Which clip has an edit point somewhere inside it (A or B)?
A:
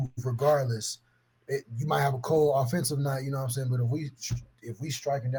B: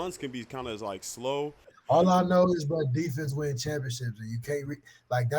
B